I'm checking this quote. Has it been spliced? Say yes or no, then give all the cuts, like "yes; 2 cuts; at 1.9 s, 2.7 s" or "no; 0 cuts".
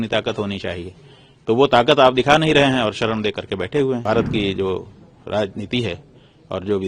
yes; 1 cut; at 4.0 s